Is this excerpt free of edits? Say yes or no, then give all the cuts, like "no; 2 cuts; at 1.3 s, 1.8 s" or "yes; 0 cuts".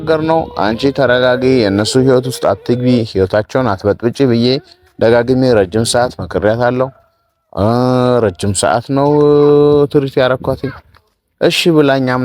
yes; 0 cuts